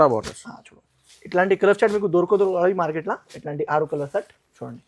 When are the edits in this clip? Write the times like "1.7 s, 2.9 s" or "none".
none